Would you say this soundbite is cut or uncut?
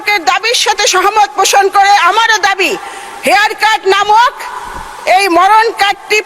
uncut